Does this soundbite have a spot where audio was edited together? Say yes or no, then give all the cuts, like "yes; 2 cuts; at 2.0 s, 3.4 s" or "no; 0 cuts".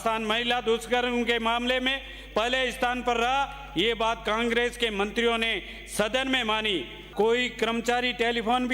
yes; 1 cut; at 7.0 s